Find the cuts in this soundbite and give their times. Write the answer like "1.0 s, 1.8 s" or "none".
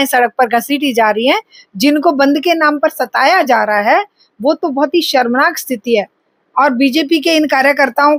none